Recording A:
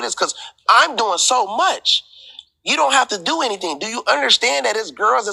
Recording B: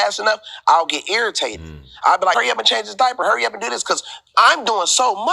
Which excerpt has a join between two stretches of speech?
B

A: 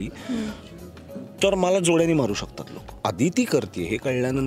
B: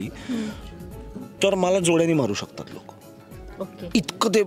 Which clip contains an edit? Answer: A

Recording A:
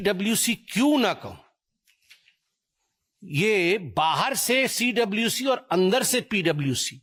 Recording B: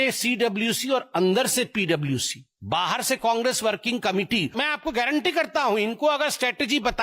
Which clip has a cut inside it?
B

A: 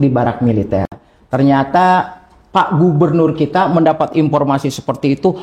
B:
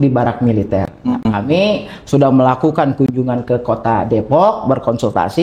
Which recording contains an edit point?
A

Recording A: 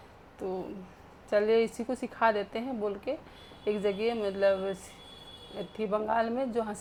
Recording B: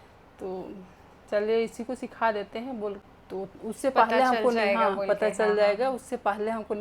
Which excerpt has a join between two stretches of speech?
B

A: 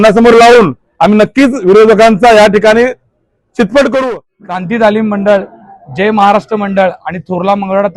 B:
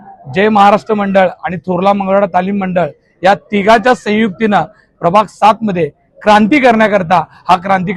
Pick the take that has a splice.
A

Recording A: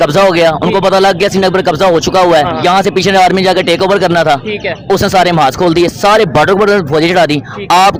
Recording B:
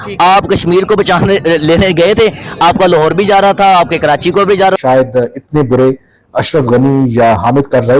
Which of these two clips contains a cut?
B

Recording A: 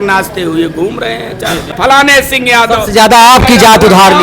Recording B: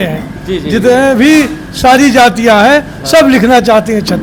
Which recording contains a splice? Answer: A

